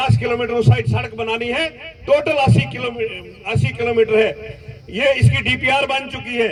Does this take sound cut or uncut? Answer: uncut